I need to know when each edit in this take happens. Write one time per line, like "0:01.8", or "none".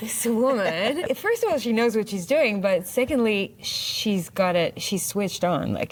none